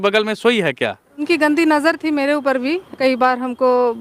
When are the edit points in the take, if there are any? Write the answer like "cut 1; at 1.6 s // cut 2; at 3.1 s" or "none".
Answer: cut 1; at 1.2 s // cut 2; at 2.9 s